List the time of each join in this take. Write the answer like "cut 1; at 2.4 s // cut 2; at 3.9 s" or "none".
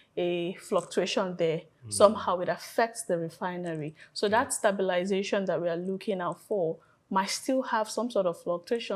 none